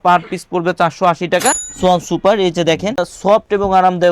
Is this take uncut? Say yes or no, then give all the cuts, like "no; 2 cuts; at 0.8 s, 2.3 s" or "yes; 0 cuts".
no; 2 cuts; at 1.7 s, 3.1 s